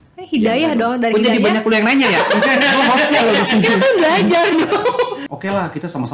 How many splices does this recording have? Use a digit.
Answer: 1